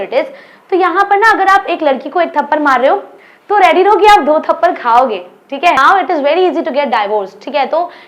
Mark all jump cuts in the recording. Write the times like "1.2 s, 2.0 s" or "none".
5.8 s